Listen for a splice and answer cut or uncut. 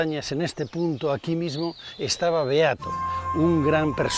uncut